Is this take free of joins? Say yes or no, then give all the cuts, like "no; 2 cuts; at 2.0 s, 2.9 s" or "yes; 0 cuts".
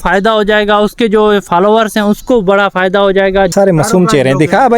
no; 1 cut; at 3.5 s